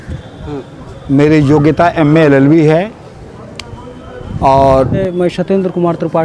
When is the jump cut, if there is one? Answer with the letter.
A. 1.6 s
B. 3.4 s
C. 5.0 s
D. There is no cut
C